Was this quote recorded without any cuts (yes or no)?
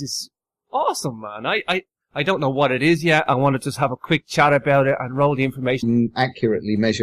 yes